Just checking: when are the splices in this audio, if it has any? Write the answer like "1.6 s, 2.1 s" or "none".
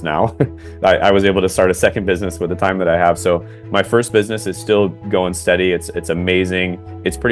none